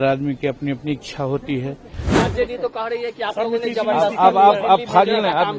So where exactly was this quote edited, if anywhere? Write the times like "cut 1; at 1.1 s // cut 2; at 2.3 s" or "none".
cut 1; at 2.1 s